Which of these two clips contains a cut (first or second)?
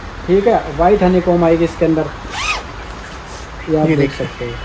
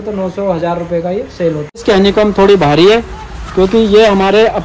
second